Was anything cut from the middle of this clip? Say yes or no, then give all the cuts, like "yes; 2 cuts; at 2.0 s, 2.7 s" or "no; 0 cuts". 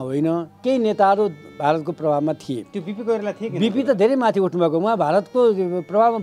no; 0 cuts